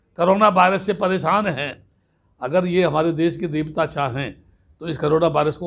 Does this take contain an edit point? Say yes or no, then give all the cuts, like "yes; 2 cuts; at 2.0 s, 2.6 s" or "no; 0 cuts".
no; 0 cuts